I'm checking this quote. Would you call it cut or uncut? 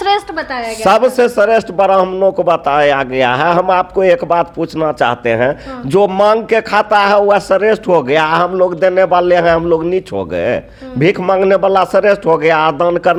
uncut